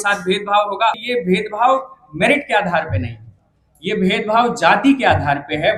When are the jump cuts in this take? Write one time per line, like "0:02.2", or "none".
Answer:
0:01.0